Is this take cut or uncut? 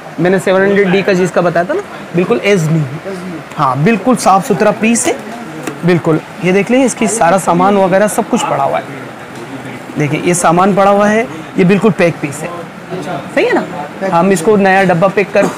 cut